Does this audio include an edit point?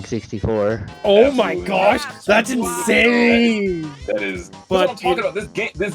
yes; 1 cut; at 4.5 s

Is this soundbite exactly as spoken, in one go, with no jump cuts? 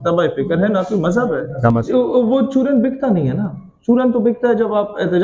no; 1 cut; at 1.8 s

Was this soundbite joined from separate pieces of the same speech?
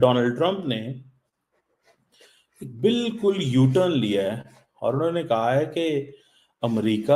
no; 0 cuts

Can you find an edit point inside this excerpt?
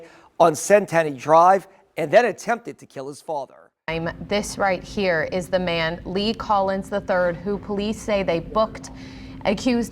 yes; 1 cut; at 3.9 s

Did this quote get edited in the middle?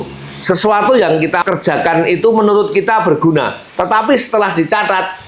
yes; 1 cut; at 1.4 s

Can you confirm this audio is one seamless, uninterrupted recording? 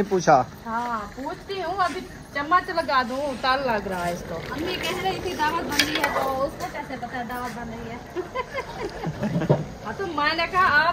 yes; 0 cuts

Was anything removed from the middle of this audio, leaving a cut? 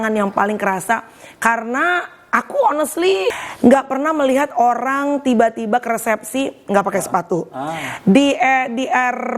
yes; 1 cut; at 3.4 s

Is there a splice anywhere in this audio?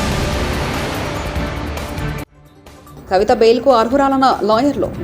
no; 0 cuts

